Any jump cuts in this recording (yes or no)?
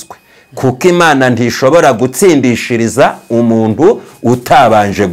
no